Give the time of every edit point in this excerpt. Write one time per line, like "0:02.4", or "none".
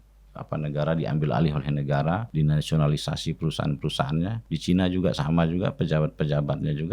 0:02.3
0:04.4